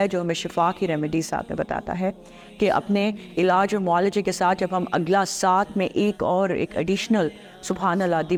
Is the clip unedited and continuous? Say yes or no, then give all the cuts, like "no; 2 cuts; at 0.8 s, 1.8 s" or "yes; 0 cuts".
yes; 0 cuts